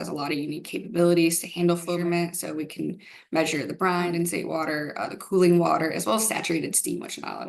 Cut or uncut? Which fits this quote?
cut